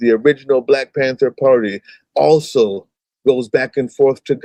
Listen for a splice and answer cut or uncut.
uncut